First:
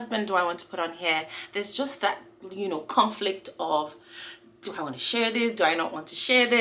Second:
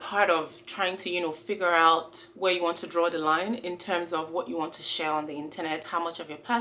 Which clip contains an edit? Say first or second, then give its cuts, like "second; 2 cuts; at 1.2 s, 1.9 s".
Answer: second; 1 cut; at 2.2 s